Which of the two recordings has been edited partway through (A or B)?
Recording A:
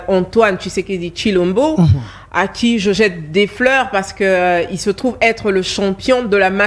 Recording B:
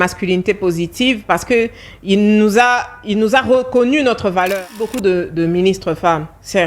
B